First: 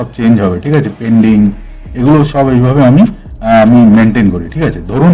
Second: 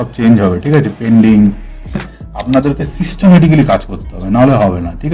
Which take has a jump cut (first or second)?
second